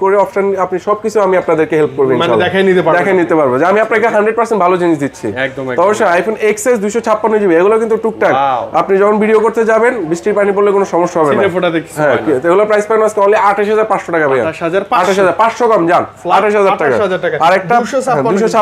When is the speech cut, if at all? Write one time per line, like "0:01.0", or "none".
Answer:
none

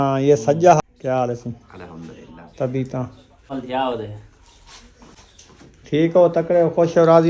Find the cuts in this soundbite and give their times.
0:00.8
0:03.5
0:05.2

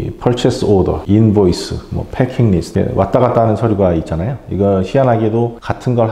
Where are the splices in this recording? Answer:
none

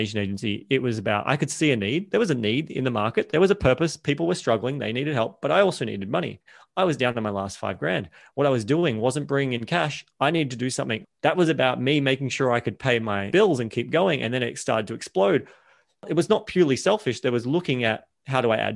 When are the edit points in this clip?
0:02.1
0:11.0

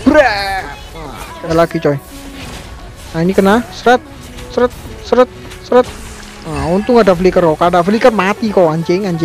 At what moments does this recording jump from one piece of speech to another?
0:01.5

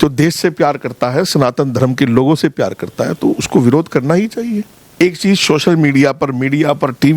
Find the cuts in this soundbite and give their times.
0:05.0

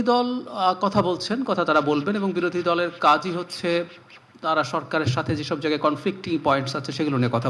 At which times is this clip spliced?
none

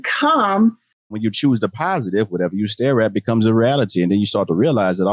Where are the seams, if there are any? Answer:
0:01.2

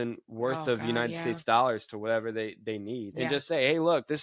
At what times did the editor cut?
0:03.1

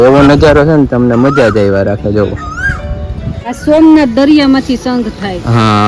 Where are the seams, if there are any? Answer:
0:03.6

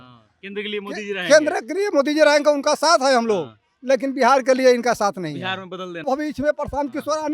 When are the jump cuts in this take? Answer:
0:06.1

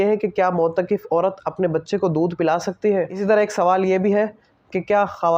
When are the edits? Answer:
0:03.1

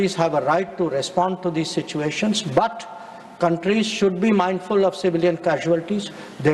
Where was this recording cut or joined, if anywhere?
none

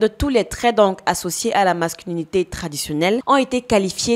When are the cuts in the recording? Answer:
0:03.2

